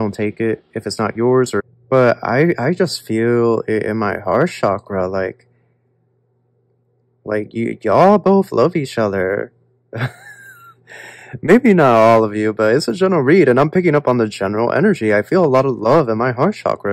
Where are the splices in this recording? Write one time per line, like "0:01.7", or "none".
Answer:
0:01.7